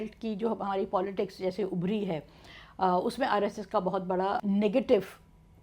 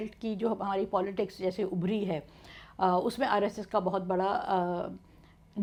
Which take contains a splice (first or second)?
first